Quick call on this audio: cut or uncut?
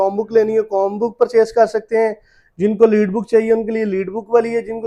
uncut